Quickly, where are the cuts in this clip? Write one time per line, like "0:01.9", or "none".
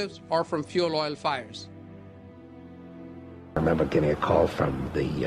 0:03.5